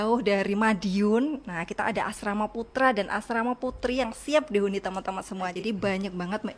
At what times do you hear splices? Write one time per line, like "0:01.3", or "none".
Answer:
0:05.5